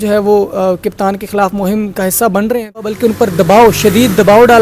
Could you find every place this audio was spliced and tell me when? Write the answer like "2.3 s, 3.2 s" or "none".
2.6 s